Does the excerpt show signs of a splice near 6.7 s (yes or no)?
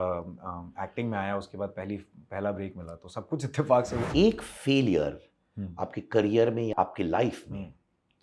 yes